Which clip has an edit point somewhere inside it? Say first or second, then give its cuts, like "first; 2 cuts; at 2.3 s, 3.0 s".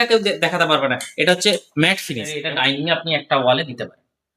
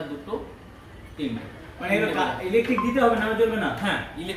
first; 1 cut; at 2.4 s